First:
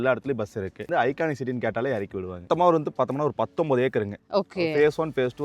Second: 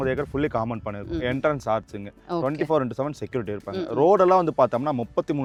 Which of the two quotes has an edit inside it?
first; 2 cuts; at 0.8 s, 2.4 s

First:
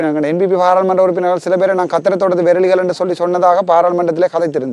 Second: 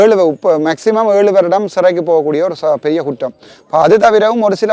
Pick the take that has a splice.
second; 1 cut; at 3.8 s

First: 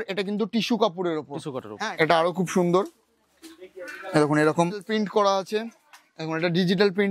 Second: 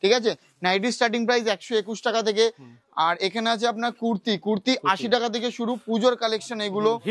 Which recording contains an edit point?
first; 2 cuts; at 1.8 s, 4.9 s

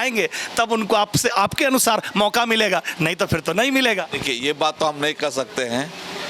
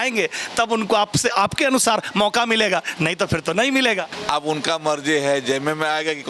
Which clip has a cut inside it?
second; 1 cut; at 4.1 s

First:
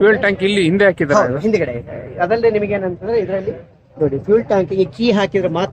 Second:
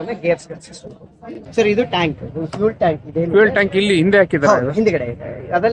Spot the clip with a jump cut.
second; 1 cut; at 1.4 s

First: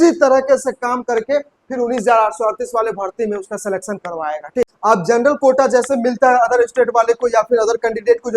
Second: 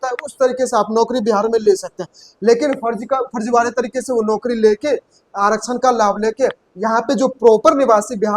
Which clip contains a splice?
first; 1 cut; at 4.7 s

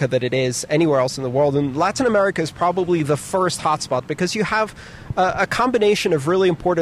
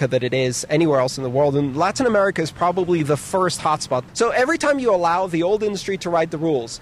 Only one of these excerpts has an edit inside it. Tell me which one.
second; 1 cut; at 4.1 s

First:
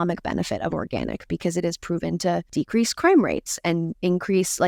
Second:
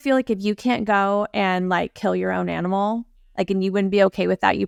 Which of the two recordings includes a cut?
first; 1 cut; at 2.5 s

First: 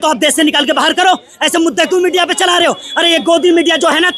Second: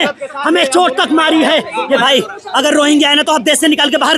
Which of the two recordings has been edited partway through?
second; 1 cut; at 2.0 s

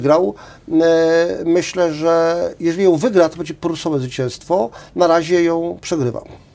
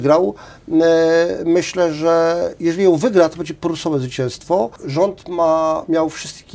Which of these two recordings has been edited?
second; 1 cut; at 4.8 s

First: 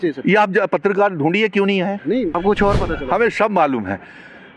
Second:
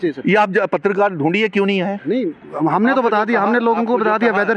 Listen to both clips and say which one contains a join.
first; 1 cut; at 2.4 s

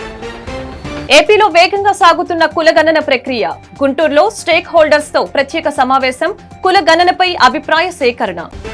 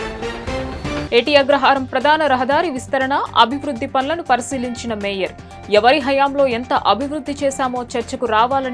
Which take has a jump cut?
first; 1 cut; at 1.0 s

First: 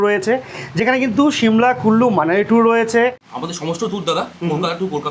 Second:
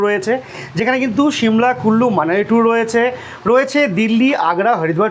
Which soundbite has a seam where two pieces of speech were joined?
first; 1 cut; at 3.3 s

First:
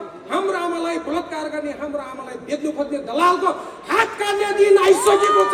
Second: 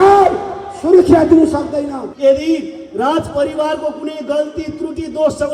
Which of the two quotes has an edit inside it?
second; 1 cut; at 2.0 s

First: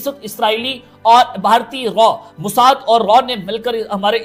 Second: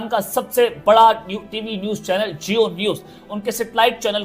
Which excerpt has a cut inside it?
second; 1 cut; at 3.3 s

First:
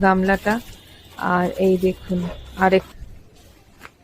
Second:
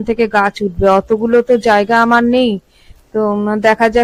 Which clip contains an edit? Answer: first; 1 cut; at 2.9 s

